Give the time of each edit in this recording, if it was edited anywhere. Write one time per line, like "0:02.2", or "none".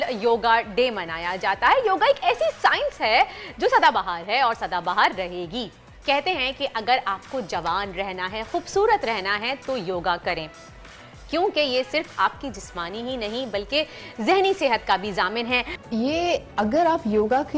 0:15.7